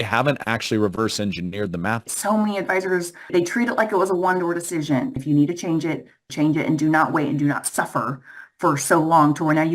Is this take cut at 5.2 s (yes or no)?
yes